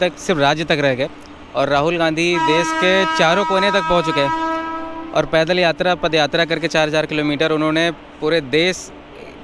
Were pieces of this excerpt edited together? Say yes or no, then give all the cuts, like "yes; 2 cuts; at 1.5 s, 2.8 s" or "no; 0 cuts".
no; 0 cuts